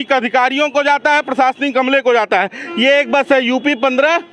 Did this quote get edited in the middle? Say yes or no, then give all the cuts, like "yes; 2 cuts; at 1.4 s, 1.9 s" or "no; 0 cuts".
no; 0 cuts